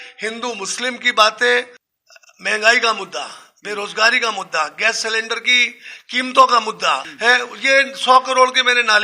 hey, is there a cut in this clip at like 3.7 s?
no; 2 cuts; at 1.8 s, 7.1 s

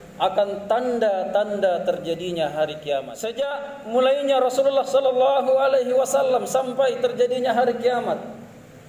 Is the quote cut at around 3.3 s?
yes; 1 cut; at 3.3 s

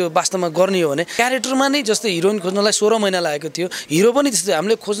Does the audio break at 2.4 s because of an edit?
no; 1 cut; at 1.1 s

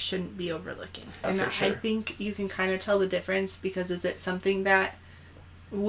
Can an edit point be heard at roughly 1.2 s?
yes; 1 cut; at 1.2 s

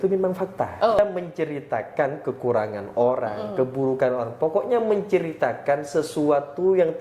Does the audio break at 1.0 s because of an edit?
yes; 1 cut; at 1.0 s

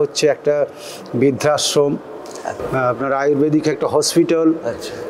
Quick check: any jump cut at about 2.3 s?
no; 0 cuts

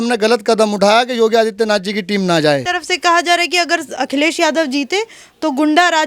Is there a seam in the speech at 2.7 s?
yes; 1 cut; at 2.7 s

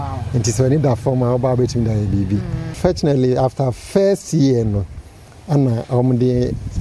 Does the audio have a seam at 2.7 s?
yes; 1 cut; at 2.7 s

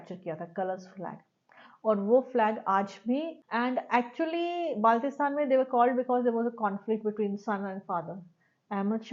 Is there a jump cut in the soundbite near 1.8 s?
no; 1 cut; at 3.4 s

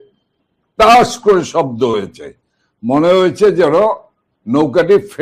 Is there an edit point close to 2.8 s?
no; 0 cuts

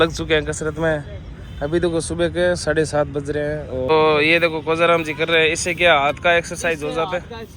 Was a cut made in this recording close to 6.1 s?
no; 1 cut; at 3.9 s

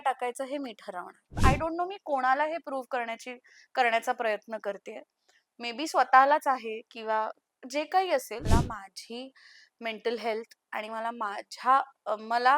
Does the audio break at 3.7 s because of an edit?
no; 2 cuts; at 1.3 s, 8.5 s

